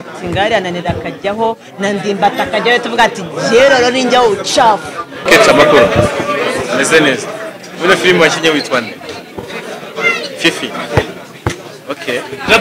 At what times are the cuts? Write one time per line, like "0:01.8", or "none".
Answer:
0:05.2

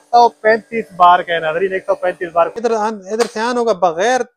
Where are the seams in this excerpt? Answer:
0:02.6

